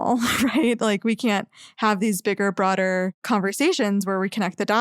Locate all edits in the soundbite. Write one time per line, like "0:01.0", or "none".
0:03.2